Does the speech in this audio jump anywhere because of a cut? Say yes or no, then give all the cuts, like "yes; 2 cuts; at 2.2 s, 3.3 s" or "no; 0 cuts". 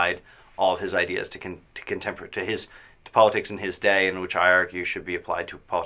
yes; 1 cut; at 2.1 s